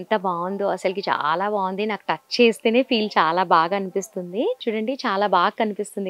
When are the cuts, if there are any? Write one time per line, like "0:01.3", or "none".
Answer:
0:04.6

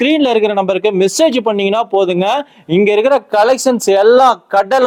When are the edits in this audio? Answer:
none

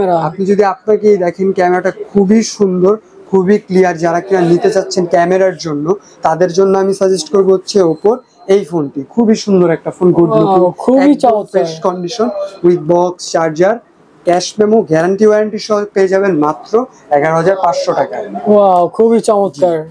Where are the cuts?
none

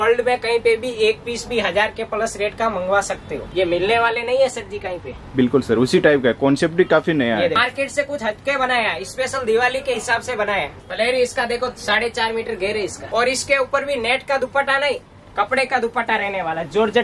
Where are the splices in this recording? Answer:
0:03.4
0:07.6
0:10.7
0:13.0

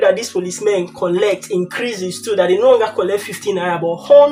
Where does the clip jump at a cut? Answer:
none

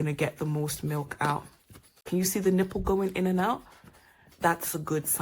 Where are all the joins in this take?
0:02.0

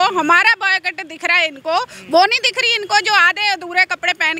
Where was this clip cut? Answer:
none

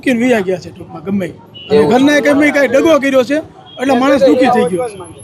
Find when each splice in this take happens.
none

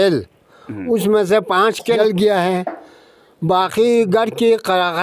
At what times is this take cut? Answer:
0:02.0

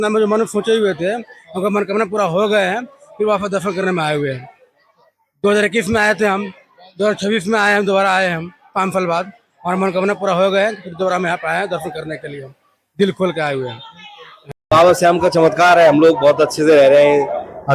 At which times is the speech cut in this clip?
0:14.6

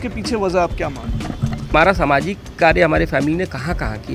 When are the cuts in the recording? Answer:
0:01.7

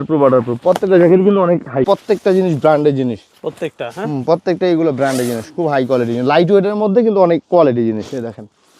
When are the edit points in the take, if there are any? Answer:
0:01.9

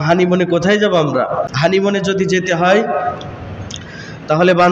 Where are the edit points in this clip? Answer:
0:01.4

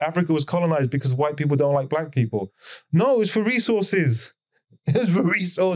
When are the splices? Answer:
none

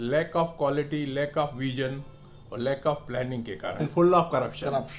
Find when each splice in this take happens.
0:03.9

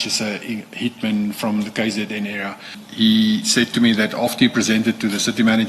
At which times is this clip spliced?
0:02.8

